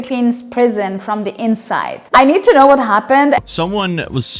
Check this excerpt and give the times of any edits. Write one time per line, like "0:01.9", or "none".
0:02.0
0:03.4